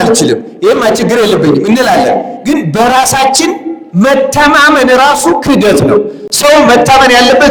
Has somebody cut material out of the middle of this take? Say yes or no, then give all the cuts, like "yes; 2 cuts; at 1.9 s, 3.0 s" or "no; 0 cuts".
no; 0 cuts